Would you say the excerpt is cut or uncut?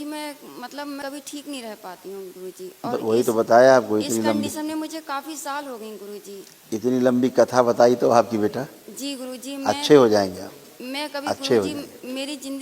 cut